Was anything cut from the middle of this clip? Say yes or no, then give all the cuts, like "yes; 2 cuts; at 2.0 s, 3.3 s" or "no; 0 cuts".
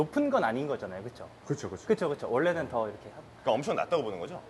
no; 0 cuts